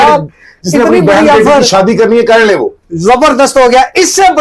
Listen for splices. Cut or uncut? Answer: uncut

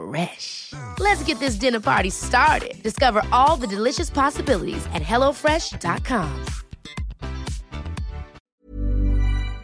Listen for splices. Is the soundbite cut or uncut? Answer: cut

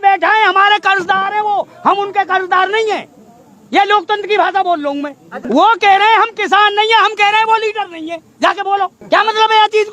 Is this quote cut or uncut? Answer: cut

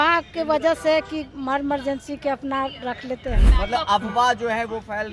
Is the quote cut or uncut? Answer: cut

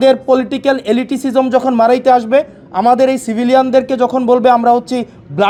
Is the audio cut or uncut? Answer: uncut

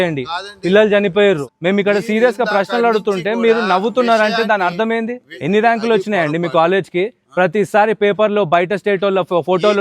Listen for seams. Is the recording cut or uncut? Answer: cut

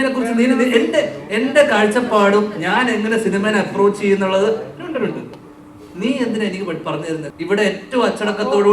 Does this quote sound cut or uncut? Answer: cut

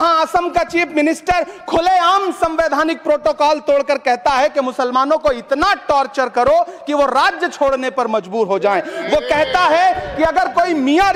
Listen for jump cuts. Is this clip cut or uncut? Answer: uncut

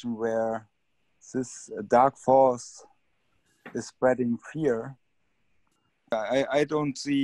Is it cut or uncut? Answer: cut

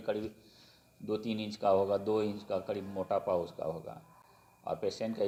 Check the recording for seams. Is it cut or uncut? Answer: uncut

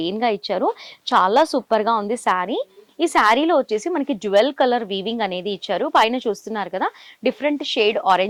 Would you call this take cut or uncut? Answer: uncut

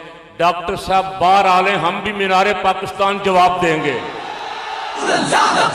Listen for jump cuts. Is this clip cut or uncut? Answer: uncut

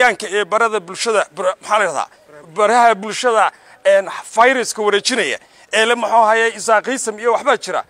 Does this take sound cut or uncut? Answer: uncut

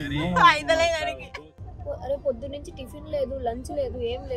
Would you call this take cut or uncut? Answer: cut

